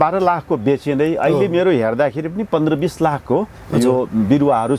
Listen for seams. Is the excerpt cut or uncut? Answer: uncut